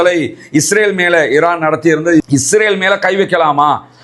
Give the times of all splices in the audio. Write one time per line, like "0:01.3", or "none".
0:02.2